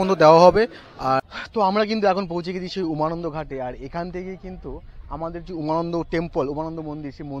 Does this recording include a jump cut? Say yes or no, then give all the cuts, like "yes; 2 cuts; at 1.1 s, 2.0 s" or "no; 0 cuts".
yes; 1 cut; at 1.4 s